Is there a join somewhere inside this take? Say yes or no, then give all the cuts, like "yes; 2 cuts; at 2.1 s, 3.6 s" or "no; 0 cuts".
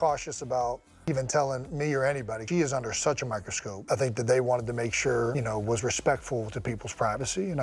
no; 0 cuts